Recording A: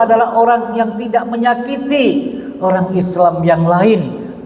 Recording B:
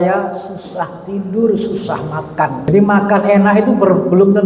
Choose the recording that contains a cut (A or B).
B